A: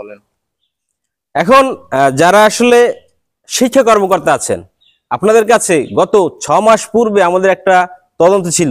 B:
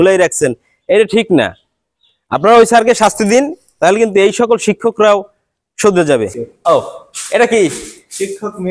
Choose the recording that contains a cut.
B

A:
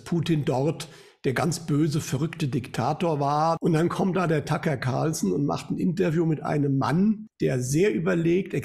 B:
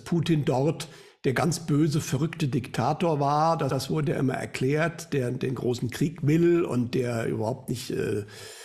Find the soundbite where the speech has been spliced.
A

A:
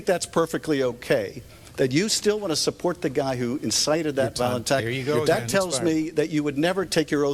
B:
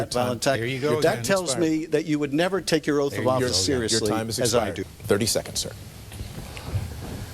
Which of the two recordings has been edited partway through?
B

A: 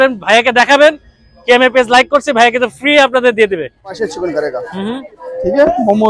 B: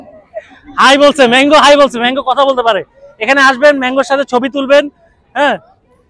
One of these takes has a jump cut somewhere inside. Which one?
A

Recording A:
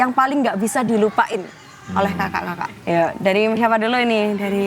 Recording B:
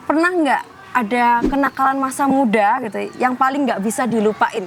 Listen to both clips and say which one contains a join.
A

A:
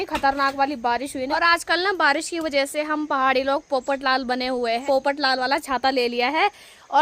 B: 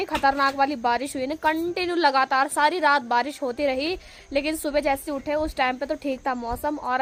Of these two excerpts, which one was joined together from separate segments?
A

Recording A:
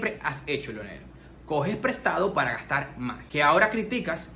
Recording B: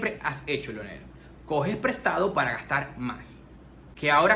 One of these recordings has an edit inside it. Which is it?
A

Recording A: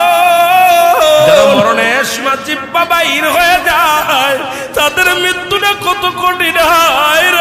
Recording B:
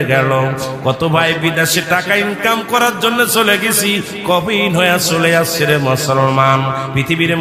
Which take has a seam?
A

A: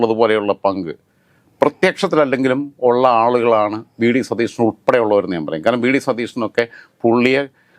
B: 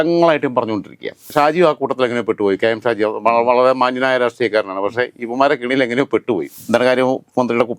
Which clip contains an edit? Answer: B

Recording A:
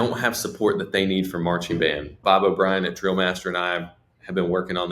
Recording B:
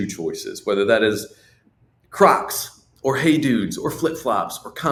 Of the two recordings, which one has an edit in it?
A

